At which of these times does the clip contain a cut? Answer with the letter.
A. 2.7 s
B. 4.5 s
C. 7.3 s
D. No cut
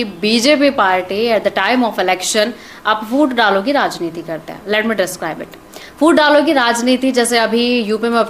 D